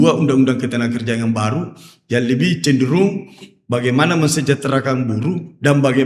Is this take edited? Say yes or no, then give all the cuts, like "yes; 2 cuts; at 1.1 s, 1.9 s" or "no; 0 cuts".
no; 0 cuts